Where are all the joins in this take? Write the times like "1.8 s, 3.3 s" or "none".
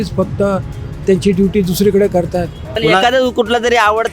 2.7 s